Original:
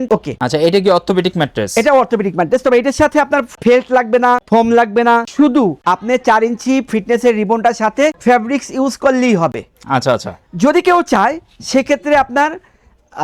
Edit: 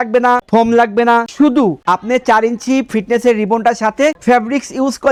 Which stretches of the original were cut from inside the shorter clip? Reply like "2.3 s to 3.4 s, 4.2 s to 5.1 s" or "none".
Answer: none